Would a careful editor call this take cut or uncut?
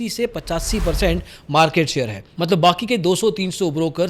uncut